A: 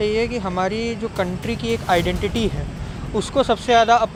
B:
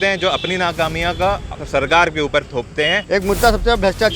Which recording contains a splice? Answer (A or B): B